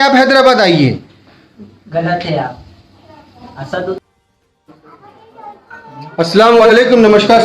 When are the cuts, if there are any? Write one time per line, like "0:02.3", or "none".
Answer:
0:04.0